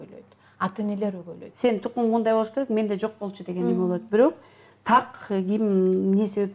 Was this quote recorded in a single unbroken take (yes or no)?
no